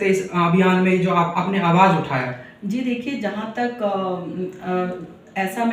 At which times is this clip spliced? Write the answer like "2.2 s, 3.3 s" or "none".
none